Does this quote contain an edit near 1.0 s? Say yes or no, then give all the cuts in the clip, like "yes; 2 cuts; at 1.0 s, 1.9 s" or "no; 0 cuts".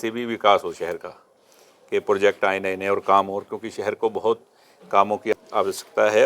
no; 1 cut; at 5.3 s